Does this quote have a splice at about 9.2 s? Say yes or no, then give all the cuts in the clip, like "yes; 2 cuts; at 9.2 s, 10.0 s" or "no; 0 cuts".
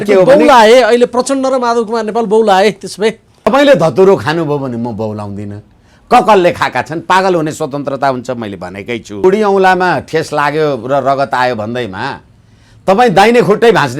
yes; 2 cuts; at 3.5 s, 9.2 s